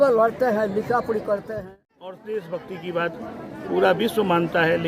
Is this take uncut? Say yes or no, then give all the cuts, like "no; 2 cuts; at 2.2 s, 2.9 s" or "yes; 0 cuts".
no; 1 cut; at 1.5 s